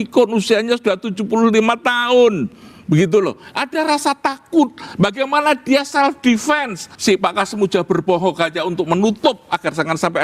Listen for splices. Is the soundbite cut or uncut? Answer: cut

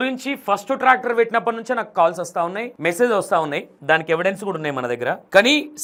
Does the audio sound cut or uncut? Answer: uncut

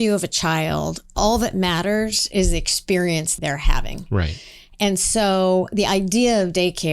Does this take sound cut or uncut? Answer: cut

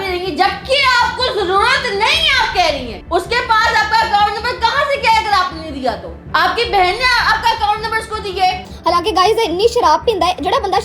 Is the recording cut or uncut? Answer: cut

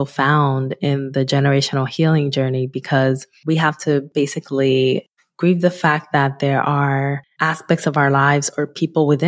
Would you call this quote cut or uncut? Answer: cut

